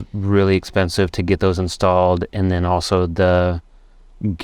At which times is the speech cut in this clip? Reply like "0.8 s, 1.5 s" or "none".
none